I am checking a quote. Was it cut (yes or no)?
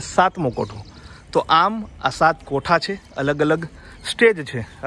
no